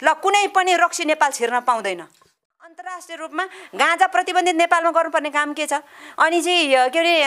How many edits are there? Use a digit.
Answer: 1